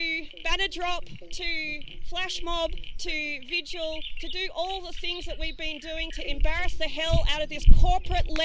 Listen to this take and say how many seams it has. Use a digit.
0